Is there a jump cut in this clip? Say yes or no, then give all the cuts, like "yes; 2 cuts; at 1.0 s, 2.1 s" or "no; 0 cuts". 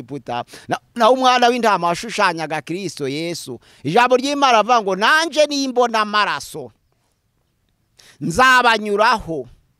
no; 0 cuts